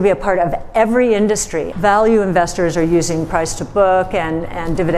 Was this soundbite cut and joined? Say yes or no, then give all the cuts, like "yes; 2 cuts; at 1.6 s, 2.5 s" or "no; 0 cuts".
yes; 1 cut; at 1.7 s